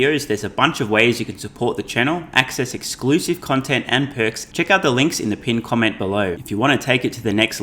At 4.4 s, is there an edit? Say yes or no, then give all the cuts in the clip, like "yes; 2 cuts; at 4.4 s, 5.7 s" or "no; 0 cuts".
yes; 2 cuts; at 4.4 s, 6.4 s